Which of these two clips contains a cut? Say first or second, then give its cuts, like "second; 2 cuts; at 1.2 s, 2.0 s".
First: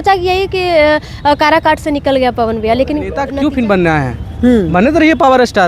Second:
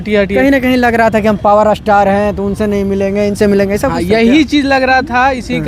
first; 1 cut; at 3.2 s